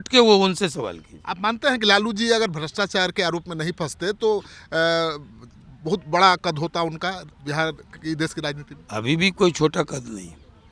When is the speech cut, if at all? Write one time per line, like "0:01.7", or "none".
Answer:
none